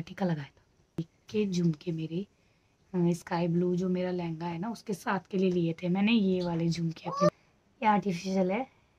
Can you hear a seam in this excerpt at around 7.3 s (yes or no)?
yes